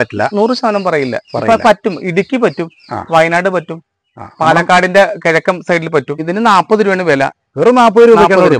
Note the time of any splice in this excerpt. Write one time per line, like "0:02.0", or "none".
0:06.2